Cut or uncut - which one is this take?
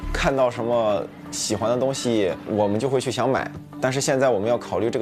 cut